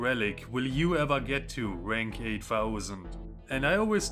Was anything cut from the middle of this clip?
yes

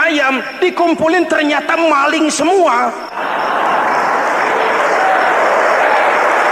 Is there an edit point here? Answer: yes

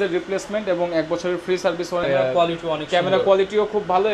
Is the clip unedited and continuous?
no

